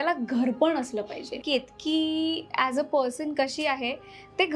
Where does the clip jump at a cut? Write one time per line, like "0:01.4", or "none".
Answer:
0:01.4